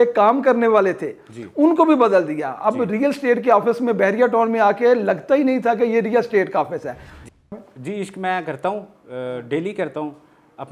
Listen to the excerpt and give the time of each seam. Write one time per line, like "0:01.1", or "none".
0:07.4